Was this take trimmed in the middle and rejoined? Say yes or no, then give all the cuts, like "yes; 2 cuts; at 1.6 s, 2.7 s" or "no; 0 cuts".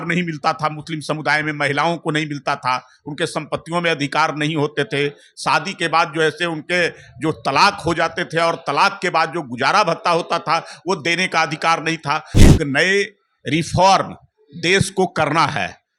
yes; 1 cut; at 12.3 s